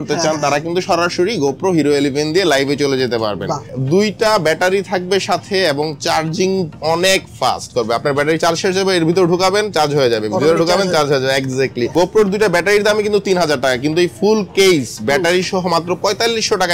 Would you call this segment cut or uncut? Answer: cut